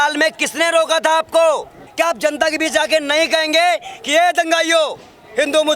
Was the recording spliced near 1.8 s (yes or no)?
yes